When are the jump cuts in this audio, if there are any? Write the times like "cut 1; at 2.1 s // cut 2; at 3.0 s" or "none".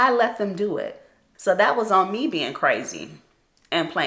cut 1; at 0.9 s